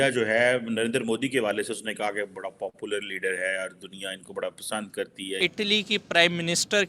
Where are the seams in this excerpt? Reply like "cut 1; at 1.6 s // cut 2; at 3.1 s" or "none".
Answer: cut 1; at 5.5 s